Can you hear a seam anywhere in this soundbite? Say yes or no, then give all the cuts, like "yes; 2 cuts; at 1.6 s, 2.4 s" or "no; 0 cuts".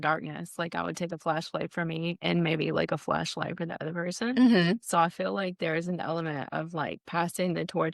no; 0 cuts